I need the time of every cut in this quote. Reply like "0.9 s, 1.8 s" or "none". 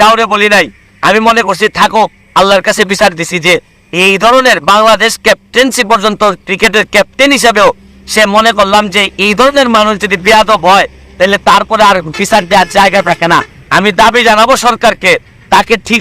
13.6 s